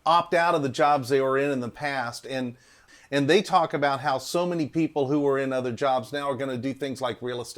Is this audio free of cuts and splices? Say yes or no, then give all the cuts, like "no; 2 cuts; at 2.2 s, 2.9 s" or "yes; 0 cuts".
no; 1 cut; at 2.8 s